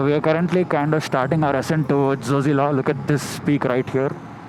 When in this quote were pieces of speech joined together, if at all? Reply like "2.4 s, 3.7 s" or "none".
none